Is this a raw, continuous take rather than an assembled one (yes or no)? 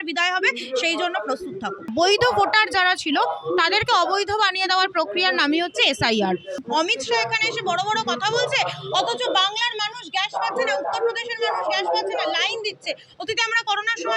no